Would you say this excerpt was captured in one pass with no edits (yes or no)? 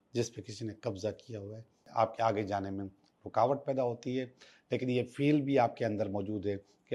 no